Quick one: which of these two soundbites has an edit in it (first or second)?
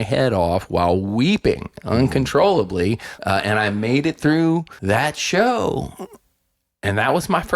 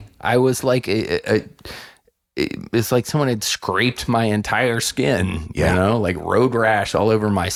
first